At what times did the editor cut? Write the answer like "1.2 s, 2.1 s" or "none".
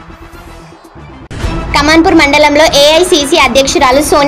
none